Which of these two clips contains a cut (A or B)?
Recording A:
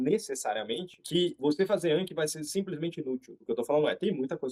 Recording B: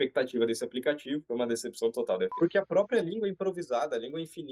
B